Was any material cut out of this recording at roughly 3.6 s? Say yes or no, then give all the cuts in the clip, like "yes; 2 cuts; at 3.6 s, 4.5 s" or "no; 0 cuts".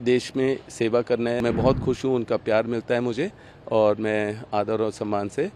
no; 1 cut; at 1.4 s